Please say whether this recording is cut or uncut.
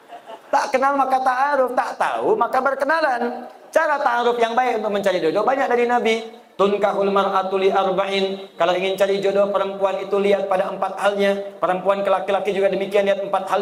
uncut